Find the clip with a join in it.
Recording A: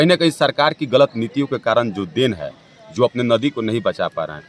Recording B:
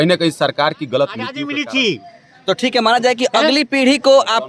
B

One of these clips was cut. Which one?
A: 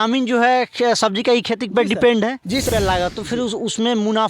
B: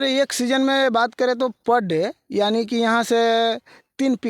A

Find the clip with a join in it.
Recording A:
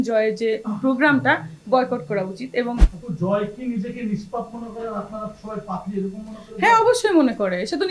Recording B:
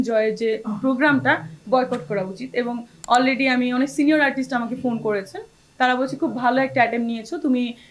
A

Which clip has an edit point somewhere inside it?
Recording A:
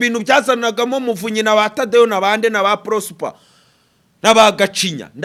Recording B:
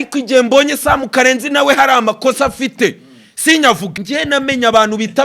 B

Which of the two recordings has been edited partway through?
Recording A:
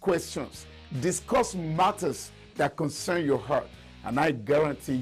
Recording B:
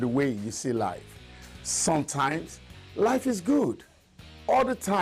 B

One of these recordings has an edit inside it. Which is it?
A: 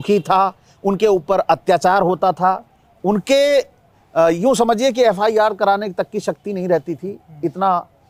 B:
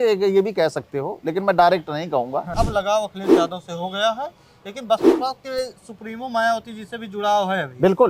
B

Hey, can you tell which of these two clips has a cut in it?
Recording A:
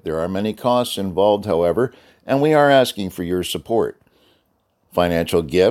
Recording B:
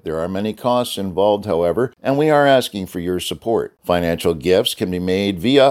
B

